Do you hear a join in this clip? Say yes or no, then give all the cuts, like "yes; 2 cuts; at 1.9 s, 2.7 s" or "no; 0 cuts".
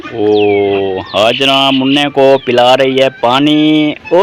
no; 0 cuts